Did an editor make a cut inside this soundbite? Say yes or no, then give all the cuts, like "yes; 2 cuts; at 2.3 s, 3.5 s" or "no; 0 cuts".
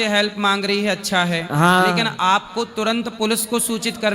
no; 0 cuts